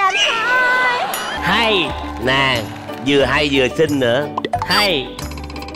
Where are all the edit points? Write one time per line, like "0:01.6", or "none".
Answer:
0:01.4